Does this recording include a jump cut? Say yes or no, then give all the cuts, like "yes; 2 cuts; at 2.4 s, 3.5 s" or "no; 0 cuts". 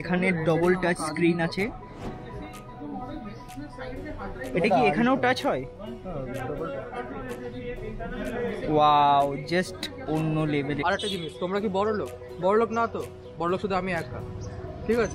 yes; 1 cut; at 10.8 s